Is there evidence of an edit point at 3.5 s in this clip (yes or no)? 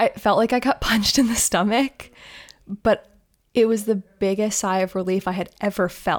no